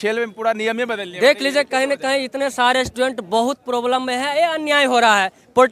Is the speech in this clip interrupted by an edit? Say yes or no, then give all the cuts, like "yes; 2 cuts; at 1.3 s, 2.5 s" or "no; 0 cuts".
no; 0 cuts